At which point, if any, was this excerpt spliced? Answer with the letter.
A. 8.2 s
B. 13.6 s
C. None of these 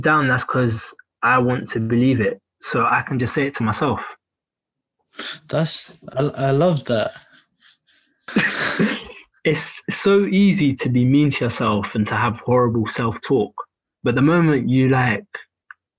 A